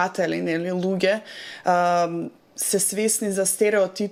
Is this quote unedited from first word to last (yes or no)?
yes